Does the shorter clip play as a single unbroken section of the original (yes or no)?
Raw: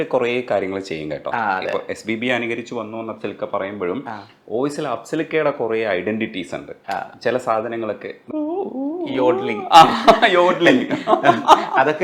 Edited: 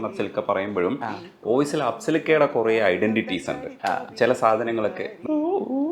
yes